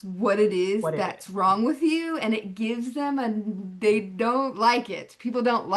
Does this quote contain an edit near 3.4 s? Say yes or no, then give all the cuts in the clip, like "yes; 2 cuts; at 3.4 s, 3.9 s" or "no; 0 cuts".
no; 0 cuts